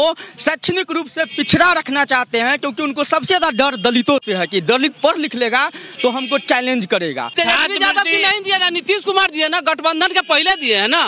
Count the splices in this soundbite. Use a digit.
1